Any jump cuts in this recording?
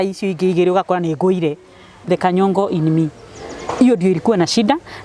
yes; 1 cut; at 1.9 s

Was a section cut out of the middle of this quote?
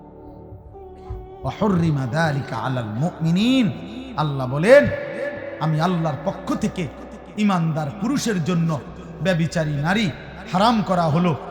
yes; 1 cut; at 1.0 s

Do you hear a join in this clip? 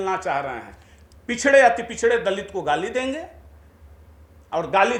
no; 0 cuts

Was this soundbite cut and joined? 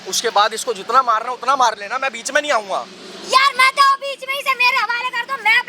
no; 0 cuts

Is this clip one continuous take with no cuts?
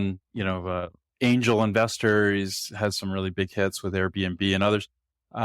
no; 1 cut; at 1.1 s

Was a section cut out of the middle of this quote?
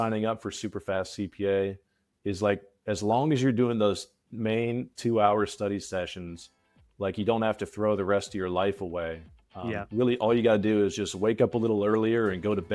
no; 0 cuts

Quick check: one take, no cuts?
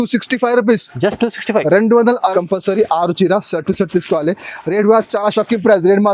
no; 1 cut; at 2.3 s

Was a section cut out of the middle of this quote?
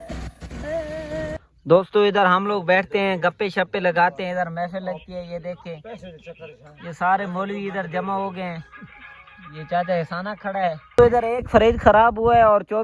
yes; 2 cuts; at 1.4 s, 10.9 s

